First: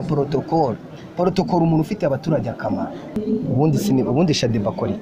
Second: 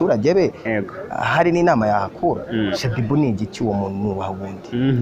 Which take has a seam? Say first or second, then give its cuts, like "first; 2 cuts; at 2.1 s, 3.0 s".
first; 1 cut; at 3.2 s